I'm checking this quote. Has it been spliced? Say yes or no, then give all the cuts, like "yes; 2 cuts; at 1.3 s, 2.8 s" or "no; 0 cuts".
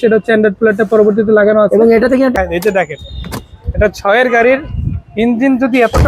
yes; 1 cut; at 2.3 s